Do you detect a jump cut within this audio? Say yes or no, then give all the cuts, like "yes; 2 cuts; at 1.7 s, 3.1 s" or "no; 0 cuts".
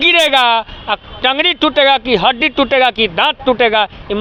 no; 0 cuts